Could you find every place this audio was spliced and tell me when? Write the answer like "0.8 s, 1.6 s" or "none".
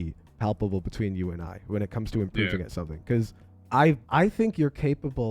4.0 s